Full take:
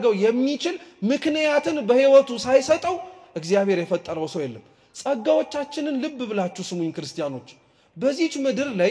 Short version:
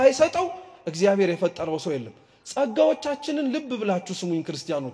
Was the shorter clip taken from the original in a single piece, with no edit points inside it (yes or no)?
yes